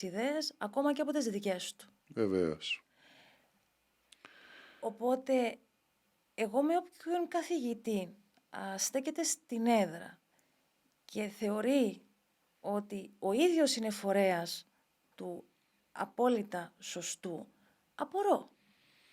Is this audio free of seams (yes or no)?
yes